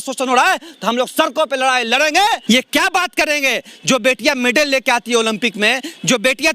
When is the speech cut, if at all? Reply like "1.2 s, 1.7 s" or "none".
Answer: 2.4 s